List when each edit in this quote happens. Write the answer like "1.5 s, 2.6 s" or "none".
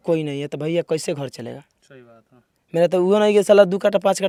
none